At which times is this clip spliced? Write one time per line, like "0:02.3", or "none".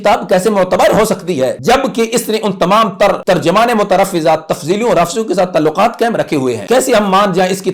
0:01.6
0:03.2
0:06.6